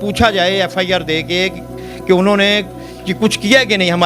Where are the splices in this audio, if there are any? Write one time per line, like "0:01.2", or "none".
none